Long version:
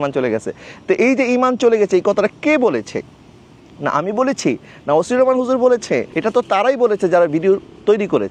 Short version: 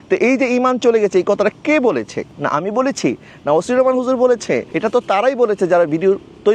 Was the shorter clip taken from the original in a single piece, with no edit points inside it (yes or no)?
no